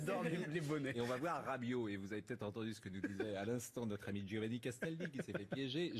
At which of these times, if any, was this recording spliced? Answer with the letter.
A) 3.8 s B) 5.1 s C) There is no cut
A